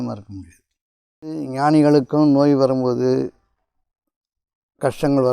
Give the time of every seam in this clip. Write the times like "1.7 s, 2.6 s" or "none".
1.5 s